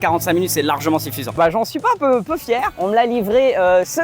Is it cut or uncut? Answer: cut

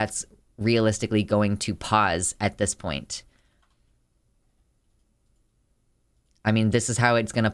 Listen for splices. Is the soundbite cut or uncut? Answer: uncut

